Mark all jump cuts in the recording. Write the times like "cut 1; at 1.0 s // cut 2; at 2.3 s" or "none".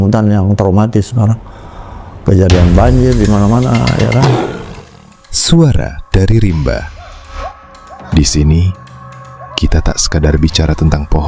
cut 1; at 4.2 s